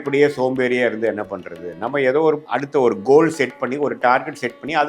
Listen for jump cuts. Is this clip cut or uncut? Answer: cut